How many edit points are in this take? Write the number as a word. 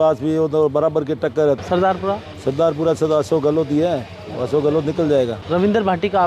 two